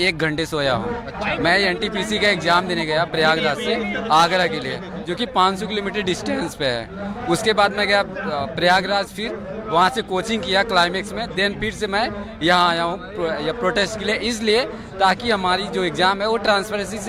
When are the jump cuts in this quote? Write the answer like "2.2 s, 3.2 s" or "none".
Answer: none